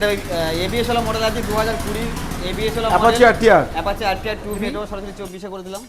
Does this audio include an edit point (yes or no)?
yes